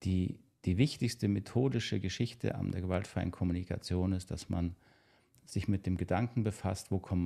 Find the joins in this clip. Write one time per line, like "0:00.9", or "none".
none